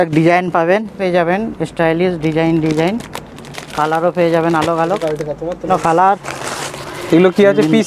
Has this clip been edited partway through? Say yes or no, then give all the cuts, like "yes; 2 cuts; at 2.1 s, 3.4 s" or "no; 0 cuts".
yes; 2 cuts; at 0.9 s, 5.7 s